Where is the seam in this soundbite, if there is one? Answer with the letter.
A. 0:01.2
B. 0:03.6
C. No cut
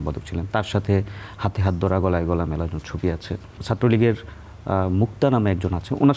B